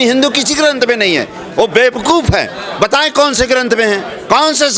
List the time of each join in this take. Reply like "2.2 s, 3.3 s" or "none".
none